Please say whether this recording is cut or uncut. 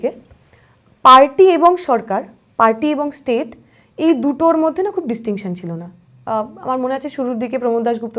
uncut